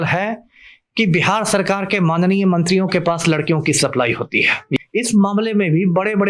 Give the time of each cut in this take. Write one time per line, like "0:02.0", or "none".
0:04.8